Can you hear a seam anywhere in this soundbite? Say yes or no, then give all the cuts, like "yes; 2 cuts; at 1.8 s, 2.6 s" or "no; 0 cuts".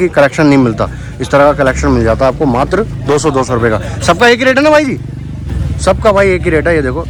no; 0 cuts